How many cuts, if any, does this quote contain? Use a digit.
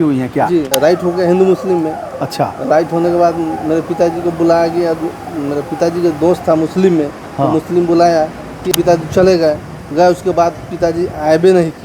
2